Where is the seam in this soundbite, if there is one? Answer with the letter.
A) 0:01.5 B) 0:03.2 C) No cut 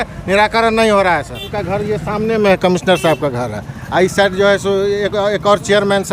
A